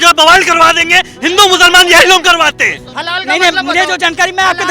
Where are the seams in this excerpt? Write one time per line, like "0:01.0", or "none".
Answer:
0:02.9